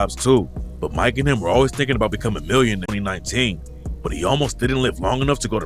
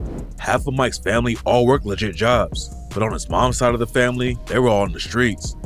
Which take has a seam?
first; 1 cut; at 2.9 s

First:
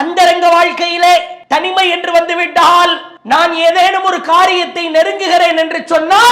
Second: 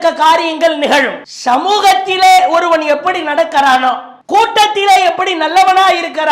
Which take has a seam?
first; 2 cuts; at 1.4 s, 3.1 s

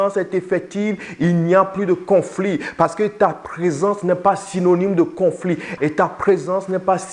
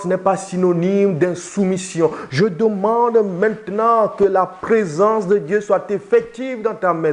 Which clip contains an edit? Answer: first; 1 cut; at 5.7 s

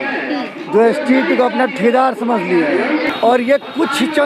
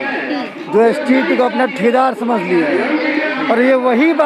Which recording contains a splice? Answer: first; 1 cut; at 3.1 s

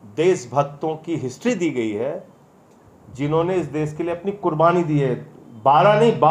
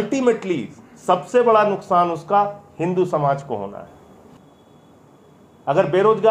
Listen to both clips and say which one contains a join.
second; 1 cut; at 4.2 s

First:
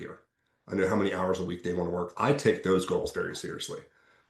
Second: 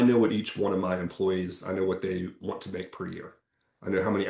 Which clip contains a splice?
first; 1 cut; at 2.1 s

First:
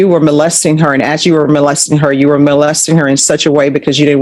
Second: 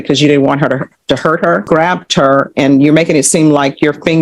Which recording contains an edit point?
second; 1 cut; at 1.6 s

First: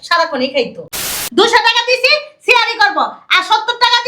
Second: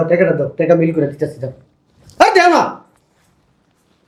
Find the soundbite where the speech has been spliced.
first; 1 cut; at 0.9 s

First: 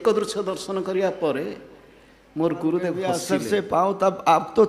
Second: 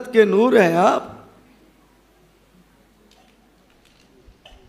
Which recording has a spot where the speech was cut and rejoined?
first; 1 cut; at 3.3 s

